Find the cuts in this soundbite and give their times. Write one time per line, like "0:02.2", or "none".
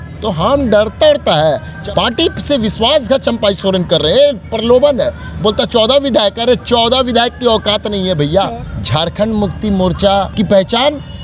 0:01.7
0:08.6
0:10.3